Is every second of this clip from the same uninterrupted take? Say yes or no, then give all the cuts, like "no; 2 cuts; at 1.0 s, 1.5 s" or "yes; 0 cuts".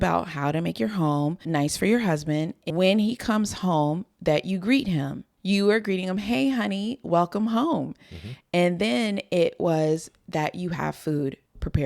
no; 2 cuts; at 2.6 s, 5.3 s